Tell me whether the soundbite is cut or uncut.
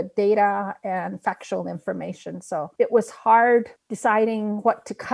uncut